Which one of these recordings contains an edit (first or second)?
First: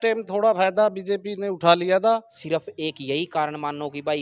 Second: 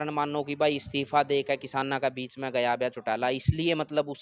first